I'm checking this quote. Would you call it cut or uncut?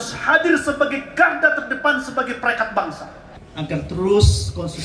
cut